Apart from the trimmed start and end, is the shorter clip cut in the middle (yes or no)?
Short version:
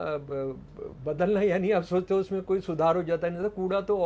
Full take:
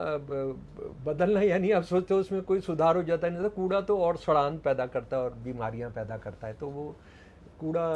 no